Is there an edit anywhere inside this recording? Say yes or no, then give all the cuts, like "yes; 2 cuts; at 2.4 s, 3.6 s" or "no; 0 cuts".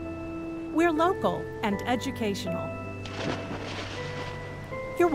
no; 0 cuts